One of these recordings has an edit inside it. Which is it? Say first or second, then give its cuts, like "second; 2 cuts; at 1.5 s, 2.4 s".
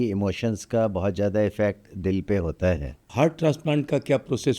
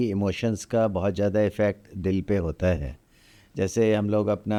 first; 1 cut; at 3.0 s